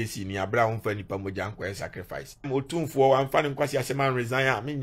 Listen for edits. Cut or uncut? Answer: cut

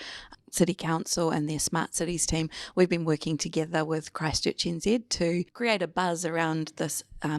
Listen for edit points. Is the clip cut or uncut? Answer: cut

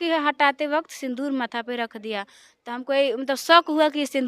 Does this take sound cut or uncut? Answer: uncut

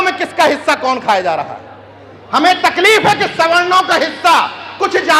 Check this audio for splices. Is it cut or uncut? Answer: uncut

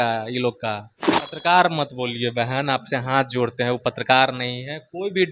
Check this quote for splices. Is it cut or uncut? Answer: cut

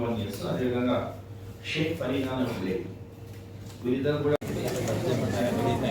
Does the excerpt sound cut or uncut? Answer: cut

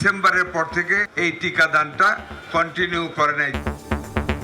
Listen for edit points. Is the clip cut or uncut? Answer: cut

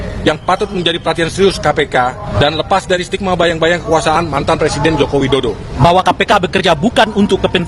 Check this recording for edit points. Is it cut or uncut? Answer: cut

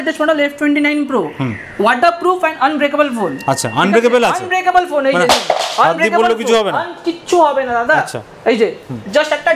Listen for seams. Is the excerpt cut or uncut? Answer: uncut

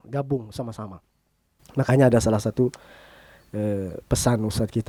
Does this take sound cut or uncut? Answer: uncut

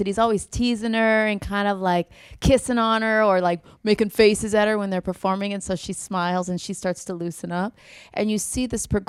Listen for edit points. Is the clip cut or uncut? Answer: uncut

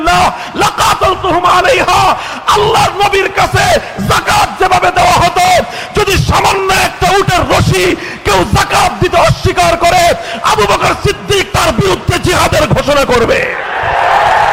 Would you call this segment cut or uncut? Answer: uncut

